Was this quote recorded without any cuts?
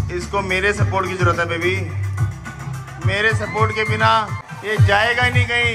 yes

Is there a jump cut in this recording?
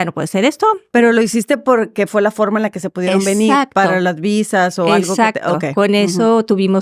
no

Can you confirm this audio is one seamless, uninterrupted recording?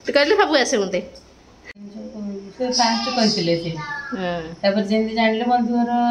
no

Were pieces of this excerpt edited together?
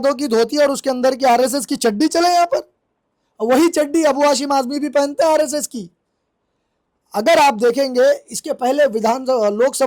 no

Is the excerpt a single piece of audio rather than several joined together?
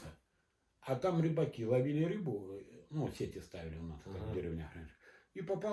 yes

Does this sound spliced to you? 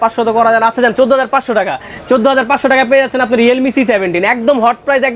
no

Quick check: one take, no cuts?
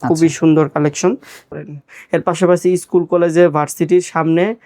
no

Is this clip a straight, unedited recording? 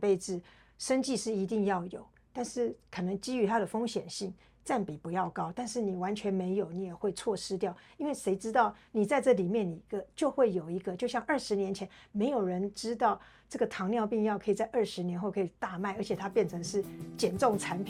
yes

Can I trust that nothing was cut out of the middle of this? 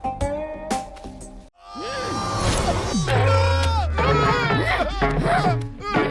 no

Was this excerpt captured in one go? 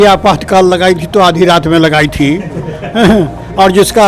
yes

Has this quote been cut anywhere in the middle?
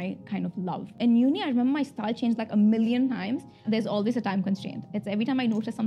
yes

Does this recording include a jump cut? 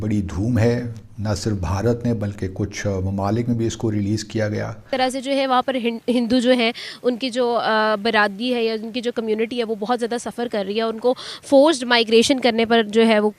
yes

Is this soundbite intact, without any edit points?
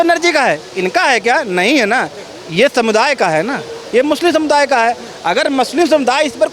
yes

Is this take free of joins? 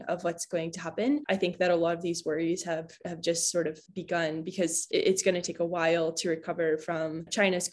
yes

